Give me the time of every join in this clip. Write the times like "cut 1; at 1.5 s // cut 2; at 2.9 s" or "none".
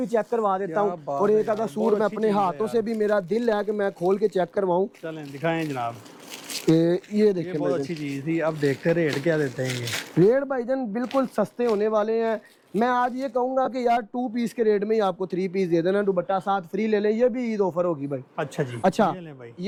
none